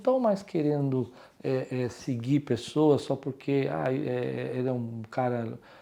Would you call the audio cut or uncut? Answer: uncut